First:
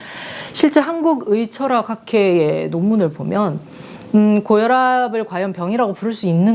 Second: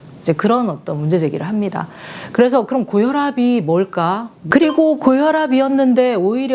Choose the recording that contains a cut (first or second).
second